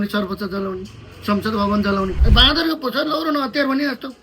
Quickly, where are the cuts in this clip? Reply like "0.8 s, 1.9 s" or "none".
2.2 s